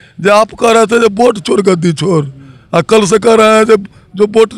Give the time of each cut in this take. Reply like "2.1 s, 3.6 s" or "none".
none